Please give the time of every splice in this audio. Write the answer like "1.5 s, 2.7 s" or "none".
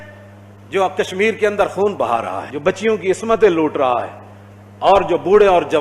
2.4 s